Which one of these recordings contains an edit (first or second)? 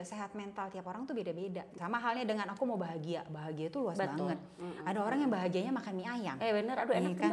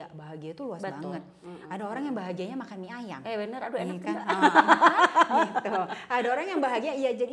first